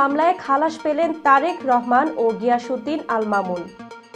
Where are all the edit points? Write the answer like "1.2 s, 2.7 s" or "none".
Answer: none

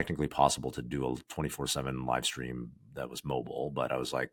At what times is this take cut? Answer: none

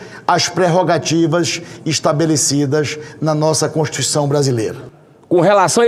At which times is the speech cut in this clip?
none

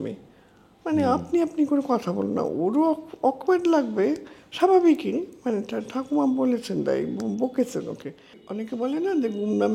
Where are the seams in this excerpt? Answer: 8.4 s

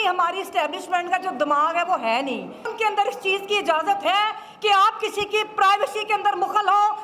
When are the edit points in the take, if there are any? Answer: 2.7 s

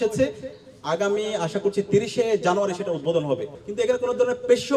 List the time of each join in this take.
3.6 s

